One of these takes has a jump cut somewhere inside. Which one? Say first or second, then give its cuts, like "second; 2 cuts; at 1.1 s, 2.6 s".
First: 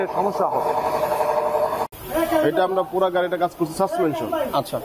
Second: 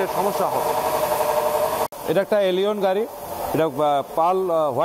first; 1 cut; at 1.9 s